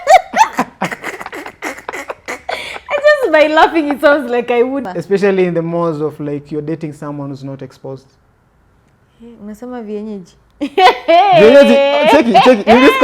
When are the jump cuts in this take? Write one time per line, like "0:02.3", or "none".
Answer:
0:04.9